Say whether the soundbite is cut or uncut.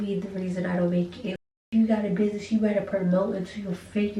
cut